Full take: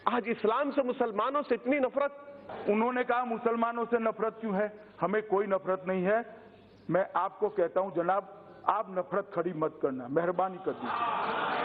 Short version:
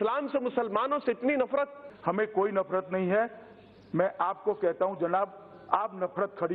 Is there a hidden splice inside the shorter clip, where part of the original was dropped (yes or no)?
yes